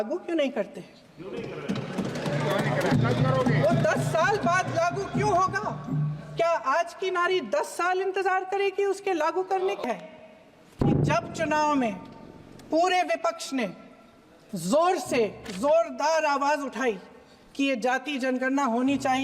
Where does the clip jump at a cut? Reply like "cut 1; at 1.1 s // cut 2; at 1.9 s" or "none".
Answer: cut 1; at 9.8 s